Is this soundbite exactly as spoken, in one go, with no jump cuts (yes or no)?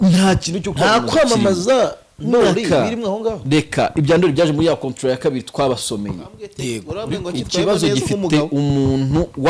no